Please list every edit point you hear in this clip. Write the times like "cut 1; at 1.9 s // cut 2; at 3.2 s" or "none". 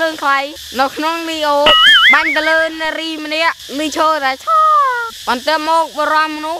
cut 1; at 5.0 s

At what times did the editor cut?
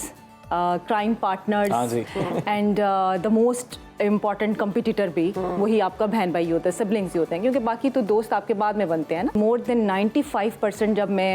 cut 1; at 9.3 s

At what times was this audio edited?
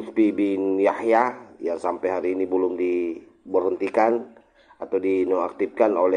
none

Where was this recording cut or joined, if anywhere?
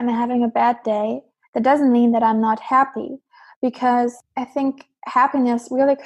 cut 1; at 4.2 s

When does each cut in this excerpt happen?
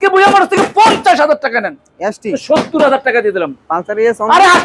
cut 1; at 2.4 s

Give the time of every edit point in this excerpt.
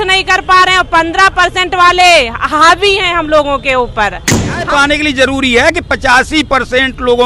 cut 1; at 4.7 s

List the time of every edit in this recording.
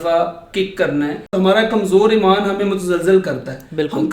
cut 1; at 1.3 s

